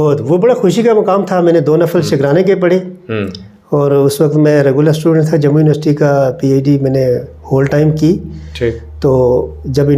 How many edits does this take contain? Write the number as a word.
zero